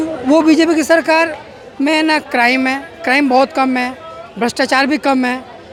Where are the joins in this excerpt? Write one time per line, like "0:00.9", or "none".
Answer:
none